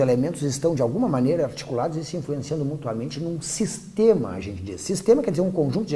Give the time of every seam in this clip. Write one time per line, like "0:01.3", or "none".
0:02.5